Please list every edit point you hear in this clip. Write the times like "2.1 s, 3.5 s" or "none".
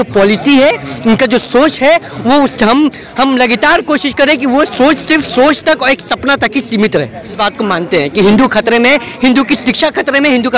7.3 s